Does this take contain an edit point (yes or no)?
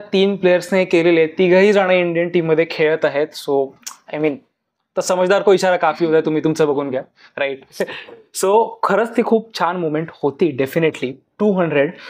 no